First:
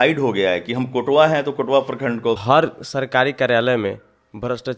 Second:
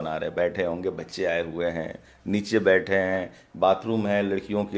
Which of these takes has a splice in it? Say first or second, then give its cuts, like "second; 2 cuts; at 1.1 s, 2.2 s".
first; 1 cut; at 2.4 s